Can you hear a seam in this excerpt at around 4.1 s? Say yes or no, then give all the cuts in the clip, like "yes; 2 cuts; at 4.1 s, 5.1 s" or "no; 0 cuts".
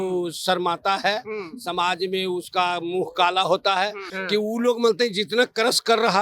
yes; 1 cut; at 4.1 s